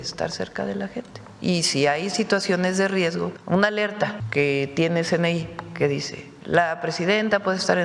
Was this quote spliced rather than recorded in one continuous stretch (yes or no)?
yes